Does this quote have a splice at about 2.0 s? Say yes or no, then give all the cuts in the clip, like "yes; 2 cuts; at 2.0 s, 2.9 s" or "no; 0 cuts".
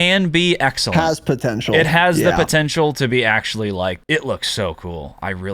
no; 1 cut; at 4.0 s